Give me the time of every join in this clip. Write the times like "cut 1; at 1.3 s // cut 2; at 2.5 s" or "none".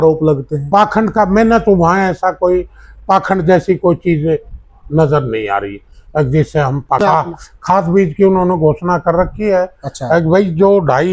cut 1; at 7.0 s